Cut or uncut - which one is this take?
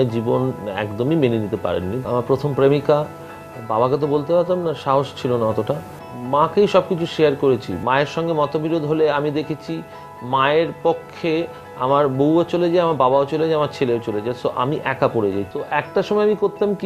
cut